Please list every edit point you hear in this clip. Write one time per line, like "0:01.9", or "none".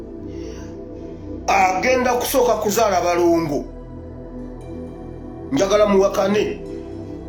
none